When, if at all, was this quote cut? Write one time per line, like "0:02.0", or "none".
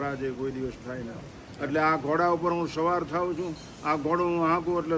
none

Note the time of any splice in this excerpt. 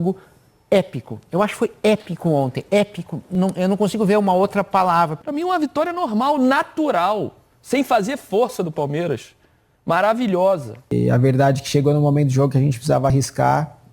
0:05.1
0:10.9

